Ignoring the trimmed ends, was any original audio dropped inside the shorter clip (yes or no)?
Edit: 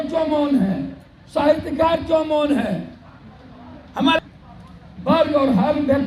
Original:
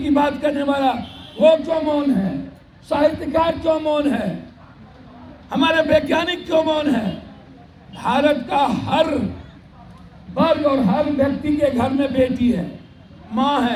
yes